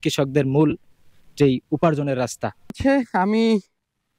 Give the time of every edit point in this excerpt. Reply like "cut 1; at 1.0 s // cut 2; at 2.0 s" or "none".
none